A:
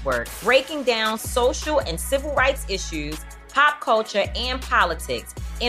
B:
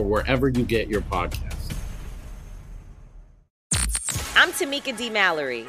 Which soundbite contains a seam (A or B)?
B